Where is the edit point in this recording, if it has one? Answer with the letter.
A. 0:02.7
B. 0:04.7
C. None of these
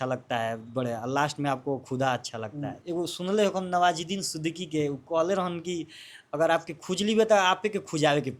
A